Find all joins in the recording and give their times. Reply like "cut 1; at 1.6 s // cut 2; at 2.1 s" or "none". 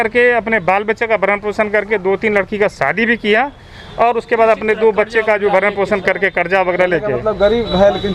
none